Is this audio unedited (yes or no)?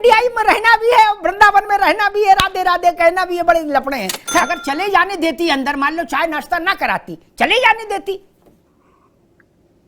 no